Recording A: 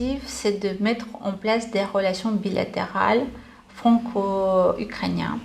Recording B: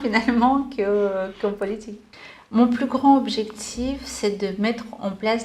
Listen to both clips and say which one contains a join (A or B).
B